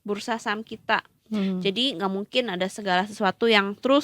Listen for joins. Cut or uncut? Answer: uncut